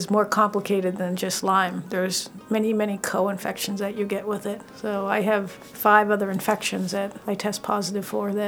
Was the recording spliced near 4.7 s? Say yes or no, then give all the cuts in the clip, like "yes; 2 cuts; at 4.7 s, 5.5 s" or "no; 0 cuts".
yes; 3 cuts; at 4.7 s, 5.6 s, 7.2 s